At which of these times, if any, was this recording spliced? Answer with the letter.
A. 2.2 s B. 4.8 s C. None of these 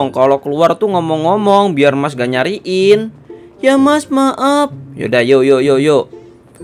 C